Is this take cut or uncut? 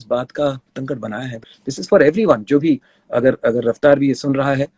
cut